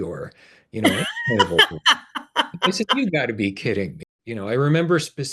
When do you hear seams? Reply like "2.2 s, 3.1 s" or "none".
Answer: 4.0 s